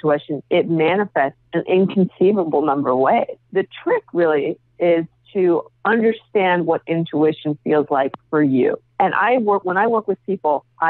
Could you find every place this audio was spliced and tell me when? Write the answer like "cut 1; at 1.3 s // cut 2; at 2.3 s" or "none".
none